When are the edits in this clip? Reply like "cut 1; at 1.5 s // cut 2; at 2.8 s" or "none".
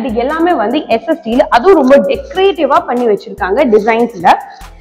none